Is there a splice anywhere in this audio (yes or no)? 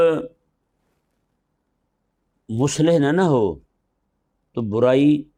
no